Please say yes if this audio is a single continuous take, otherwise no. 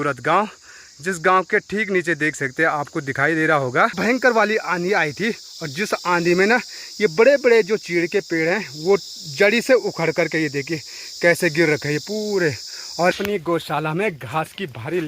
no